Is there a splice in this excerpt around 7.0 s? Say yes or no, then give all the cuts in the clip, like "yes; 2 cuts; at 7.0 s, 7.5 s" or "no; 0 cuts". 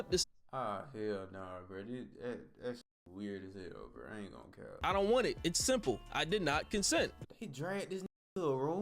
no; 1 cut; at 4.8 s